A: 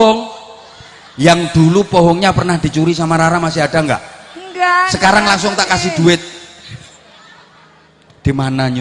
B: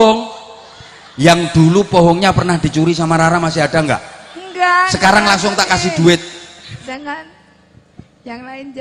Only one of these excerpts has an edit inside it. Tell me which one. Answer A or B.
B